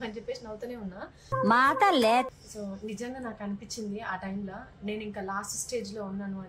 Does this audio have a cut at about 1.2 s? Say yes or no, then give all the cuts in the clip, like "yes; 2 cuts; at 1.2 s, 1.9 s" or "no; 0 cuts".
no; 1 cut; at 2.4 s